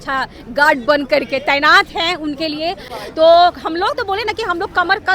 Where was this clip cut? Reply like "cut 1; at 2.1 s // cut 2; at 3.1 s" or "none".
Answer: cut 1; at 2.9 s